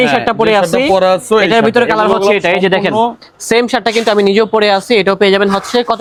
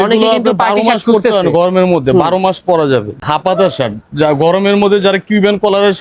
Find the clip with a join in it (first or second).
second